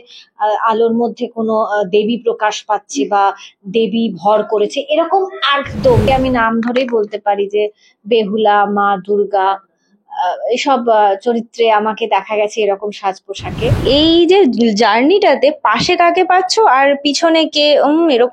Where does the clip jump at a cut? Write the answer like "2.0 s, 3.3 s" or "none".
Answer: 6.0 s, 13.8 s